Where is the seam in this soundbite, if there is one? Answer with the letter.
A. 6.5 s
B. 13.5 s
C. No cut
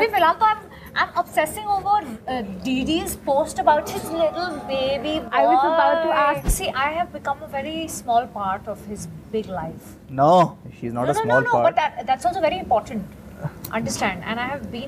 A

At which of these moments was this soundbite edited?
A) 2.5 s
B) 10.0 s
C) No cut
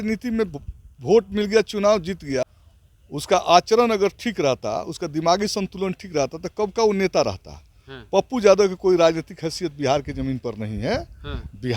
A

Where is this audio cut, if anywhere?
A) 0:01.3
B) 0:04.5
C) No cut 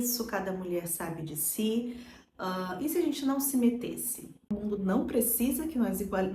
B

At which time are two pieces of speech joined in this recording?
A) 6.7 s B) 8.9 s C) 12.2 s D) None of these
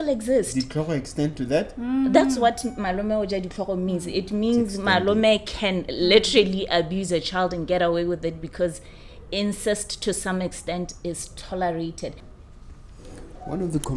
C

